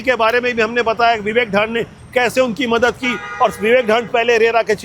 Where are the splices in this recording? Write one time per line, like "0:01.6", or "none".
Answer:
none